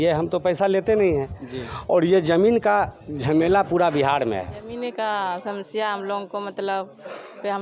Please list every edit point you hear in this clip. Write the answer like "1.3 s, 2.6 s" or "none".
4.7 s

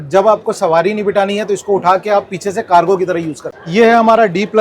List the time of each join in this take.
3.4 s

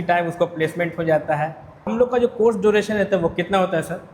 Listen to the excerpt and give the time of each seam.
1.9 s

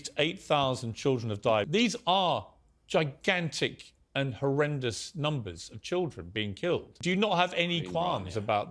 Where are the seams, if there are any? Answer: 1.7 s, 6.9 s

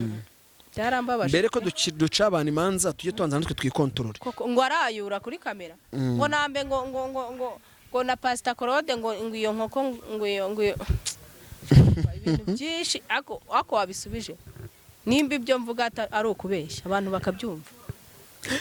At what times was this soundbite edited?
none

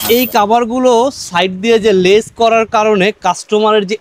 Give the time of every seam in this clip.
none

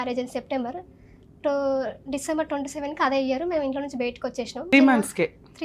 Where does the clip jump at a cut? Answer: 4.7 s

